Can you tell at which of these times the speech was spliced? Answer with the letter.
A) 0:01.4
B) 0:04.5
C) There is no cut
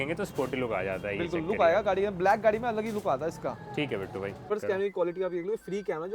B